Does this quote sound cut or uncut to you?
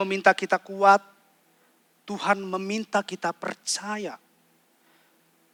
uncut